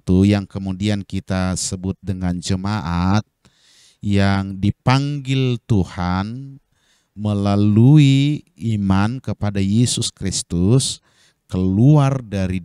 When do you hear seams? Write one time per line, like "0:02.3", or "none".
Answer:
none